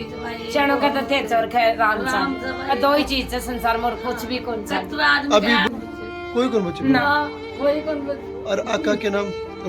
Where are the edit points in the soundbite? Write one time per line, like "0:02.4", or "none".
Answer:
0:05.7